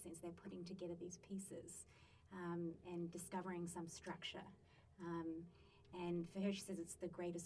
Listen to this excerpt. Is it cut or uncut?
uncut